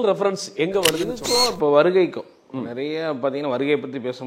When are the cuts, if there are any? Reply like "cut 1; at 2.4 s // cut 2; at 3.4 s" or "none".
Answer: cut 1; at 1.2 s